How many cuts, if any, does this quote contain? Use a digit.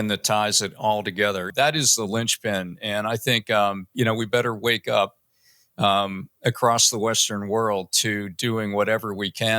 1